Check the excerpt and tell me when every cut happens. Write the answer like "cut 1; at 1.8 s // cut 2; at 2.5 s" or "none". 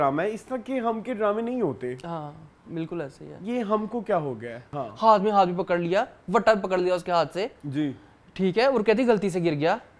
cut 1; at 4.7 s // cut 2; at 7.6 s